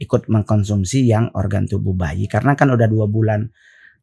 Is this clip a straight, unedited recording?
yes; 0 cuts

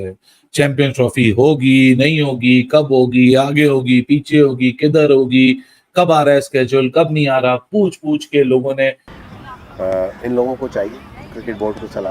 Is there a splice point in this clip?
yes; 1 cut; at 9.1 s

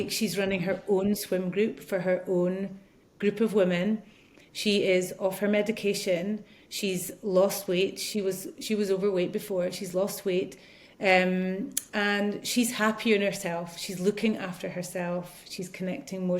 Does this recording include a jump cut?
no; 0 cuts

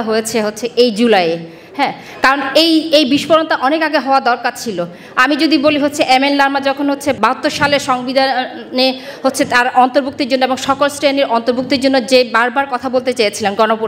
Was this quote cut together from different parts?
no; 0 cuts

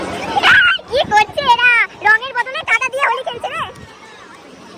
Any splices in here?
no; 0 cuts

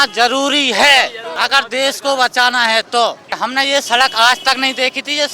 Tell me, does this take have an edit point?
yes; 2 cuts; at 1.2 s, 3.3 s

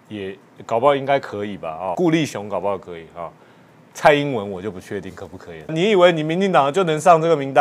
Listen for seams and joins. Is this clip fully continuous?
no; 2 cuts; at 1.9 s, 5.7 s

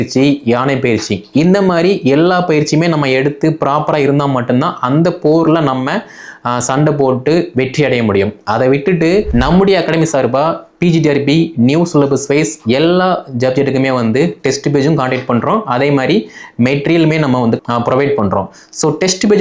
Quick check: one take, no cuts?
no; 2 cuts; at 9.3 s, 17.6 s

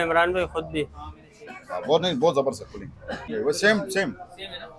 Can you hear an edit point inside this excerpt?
yes; 1 cut; at 3.3 s

